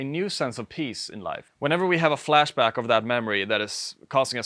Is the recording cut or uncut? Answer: cut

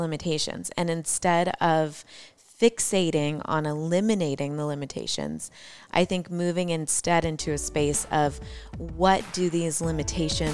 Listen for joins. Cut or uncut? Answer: uncut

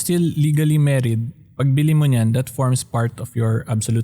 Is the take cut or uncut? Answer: uncut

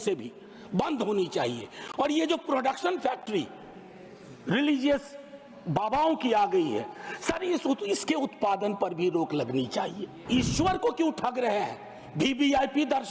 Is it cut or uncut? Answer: cut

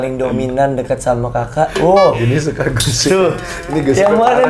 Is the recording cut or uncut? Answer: uncut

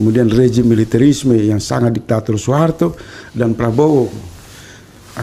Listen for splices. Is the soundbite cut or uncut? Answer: uncut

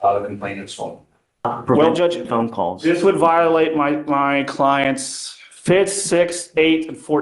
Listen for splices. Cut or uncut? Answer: cut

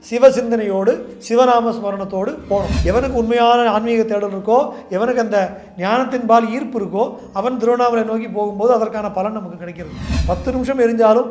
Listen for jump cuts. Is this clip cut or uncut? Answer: cut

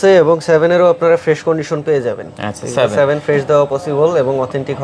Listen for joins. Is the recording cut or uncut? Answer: uncut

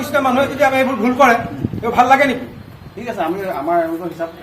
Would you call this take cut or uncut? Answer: uncut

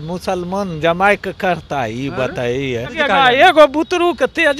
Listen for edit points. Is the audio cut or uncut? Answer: cut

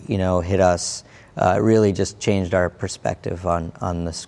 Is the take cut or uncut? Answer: uncut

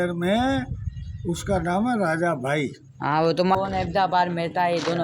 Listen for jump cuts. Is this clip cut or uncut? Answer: cut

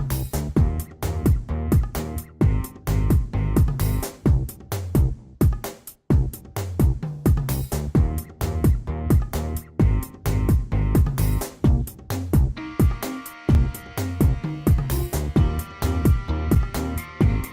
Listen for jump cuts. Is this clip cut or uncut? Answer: cut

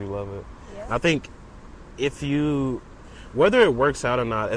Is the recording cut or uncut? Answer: uncut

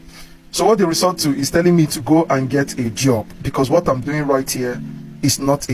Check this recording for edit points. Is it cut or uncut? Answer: uncut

